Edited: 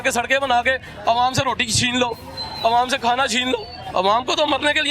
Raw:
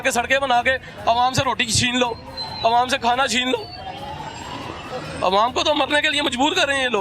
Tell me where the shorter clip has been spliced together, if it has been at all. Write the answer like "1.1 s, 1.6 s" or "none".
3.8 s